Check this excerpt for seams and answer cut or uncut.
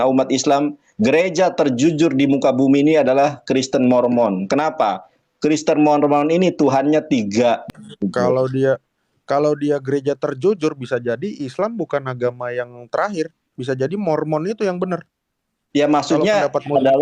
cut